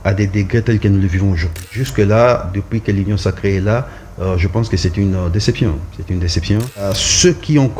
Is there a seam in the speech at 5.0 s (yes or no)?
no